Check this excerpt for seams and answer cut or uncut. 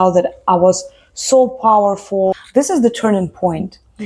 cut